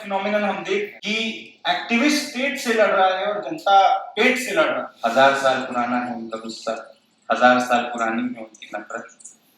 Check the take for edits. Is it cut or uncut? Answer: cut